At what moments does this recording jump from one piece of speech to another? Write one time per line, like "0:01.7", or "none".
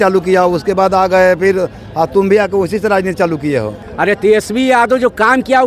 0:03.8